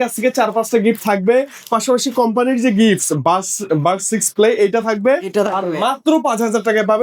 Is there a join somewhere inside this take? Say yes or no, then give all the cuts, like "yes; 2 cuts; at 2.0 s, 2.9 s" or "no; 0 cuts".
no; 0 cuts